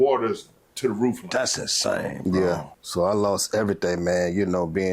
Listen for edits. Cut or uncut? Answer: cut